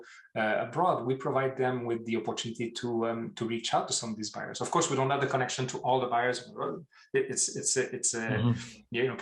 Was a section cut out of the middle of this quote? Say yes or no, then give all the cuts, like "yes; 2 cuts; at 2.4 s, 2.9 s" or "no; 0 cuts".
no; 0 cuts